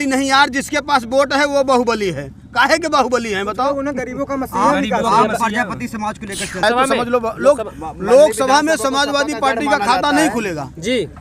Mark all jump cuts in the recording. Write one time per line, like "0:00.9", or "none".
0:06.6